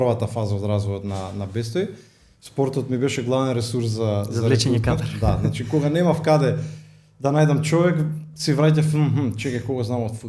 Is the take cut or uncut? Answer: uncut